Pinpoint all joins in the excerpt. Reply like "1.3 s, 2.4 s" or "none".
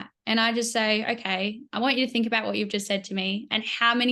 none